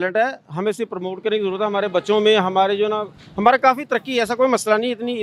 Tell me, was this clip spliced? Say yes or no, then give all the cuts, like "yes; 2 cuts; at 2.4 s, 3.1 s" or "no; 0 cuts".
no; 0 cuts